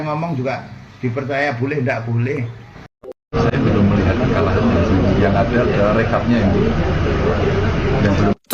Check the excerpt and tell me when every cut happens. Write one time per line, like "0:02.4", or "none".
0:03.3

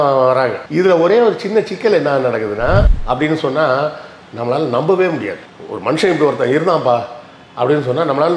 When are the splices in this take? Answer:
0:02.9

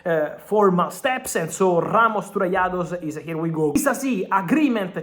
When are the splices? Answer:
0:03.8

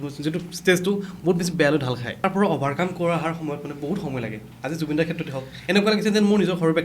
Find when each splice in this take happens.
0:02.2

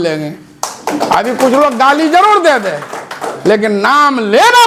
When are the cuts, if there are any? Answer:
none

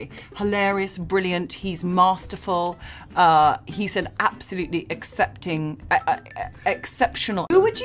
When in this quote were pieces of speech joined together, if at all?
0:00.9

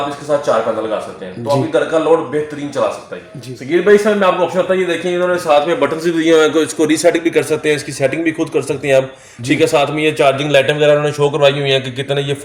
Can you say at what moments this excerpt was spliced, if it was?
none

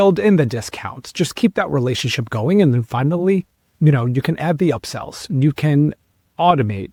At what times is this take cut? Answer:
none

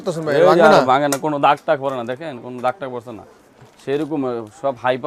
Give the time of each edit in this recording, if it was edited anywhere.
none

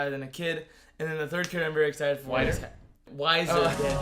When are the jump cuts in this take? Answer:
0:03.0

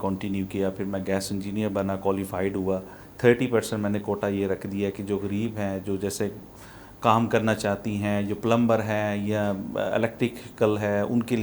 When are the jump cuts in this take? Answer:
0:03.0

